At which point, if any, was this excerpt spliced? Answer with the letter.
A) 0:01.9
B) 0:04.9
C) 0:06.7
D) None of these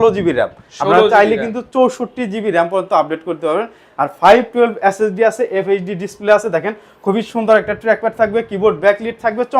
D